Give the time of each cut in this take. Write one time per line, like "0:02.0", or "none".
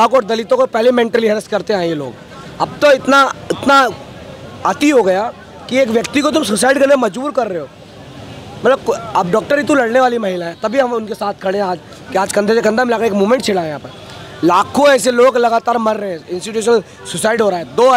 none